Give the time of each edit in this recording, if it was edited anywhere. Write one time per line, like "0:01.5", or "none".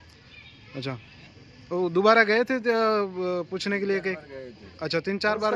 none